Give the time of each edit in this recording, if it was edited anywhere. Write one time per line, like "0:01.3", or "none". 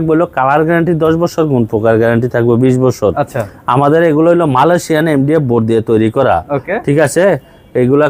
none